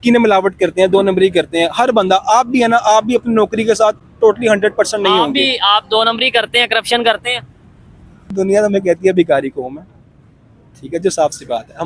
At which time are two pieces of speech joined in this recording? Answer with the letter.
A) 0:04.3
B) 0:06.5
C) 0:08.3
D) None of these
C